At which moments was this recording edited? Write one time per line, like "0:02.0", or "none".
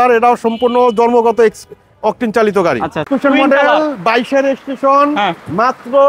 0:03.1